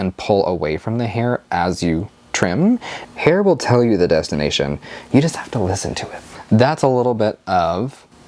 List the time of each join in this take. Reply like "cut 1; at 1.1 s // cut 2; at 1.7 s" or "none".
cut 1; at 2.9 s // cut 2; at 6.3 s